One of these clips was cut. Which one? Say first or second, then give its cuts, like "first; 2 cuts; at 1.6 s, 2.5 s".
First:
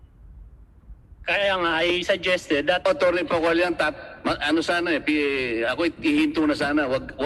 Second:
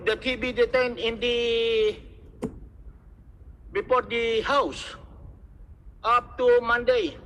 first; 1 cut; at 1.1 s